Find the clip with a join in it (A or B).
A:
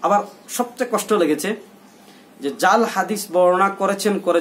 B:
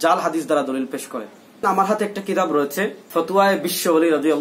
B